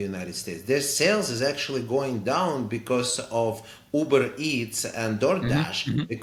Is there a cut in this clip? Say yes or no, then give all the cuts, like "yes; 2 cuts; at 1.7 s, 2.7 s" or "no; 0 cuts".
no; 0 cuts